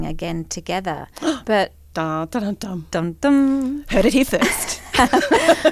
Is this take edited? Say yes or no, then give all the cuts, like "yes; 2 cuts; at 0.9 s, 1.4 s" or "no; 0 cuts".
no; 0 cuts